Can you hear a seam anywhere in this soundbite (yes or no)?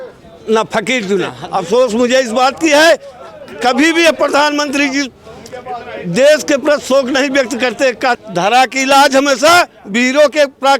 yes